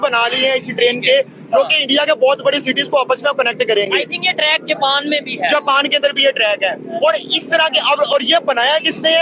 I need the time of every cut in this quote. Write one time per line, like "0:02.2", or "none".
none